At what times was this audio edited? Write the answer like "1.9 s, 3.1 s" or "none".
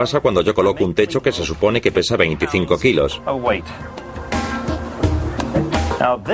3.8 s